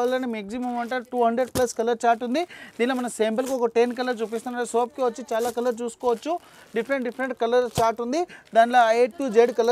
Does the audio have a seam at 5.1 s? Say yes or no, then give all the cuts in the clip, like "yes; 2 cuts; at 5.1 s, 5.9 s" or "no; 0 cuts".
no; 0 cuts